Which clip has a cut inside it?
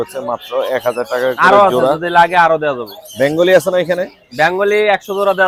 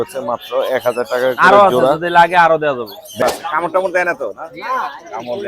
second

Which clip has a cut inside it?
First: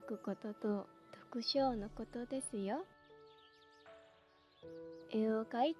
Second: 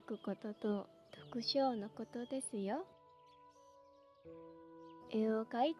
second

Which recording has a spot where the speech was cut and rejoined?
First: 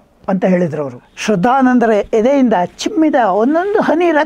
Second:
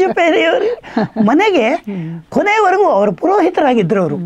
first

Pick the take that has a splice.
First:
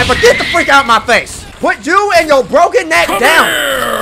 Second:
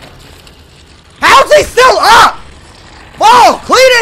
first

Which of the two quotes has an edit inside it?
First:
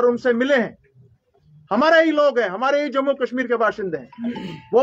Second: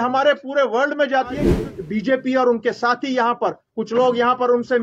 second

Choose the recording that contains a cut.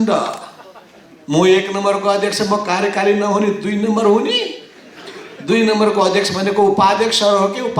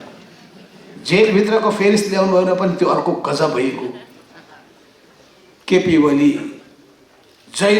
second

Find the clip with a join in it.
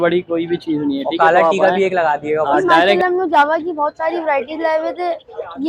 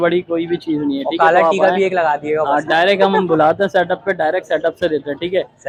first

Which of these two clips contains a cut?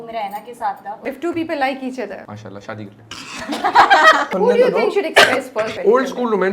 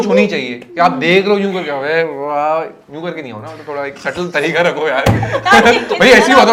first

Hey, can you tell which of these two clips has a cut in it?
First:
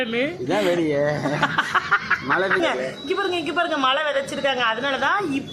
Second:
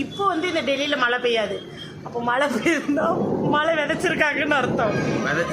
first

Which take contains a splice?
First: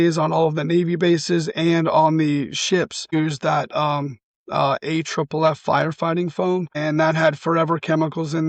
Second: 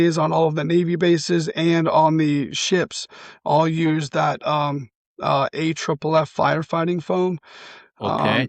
first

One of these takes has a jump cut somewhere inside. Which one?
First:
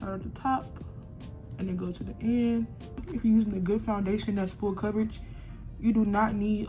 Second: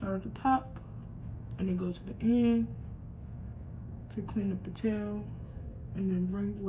first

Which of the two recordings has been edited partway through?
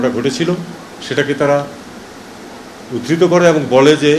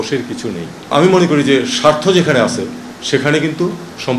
second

